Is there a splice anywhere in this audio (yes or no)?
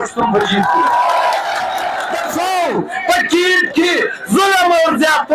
yes